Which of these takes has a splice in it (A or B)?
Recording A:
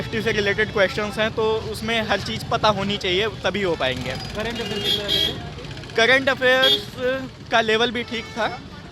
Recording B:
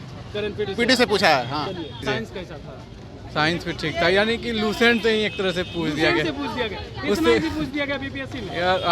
B